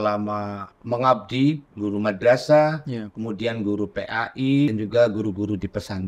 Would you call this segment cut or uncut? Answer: cut